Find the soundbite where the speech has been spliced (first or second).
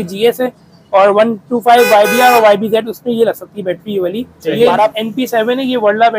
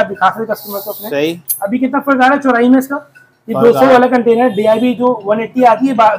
first